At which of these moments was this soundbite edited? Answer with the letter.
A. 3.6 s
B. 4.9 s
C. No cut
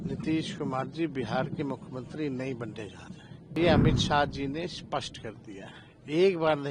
A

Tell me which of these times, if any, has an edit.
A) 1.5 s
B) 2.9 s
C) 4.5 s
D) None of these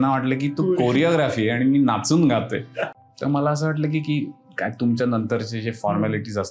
B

